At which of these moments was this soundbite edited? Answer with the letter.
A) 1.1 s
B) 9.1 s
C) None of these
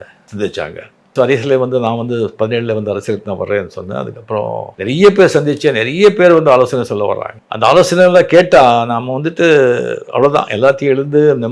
A